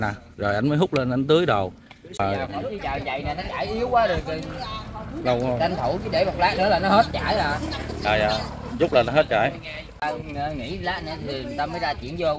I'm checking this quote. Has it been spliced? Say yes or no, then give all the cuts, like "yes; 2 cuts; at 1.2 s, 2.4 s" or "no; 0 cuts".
yes; 2 cuts; at 2.2 s, 10.0 s